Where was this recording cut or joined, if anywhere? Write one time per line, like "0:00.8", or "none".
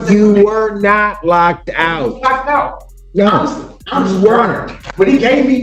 none